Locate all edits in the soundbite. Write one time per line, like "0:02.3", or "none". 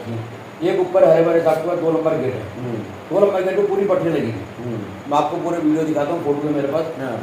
none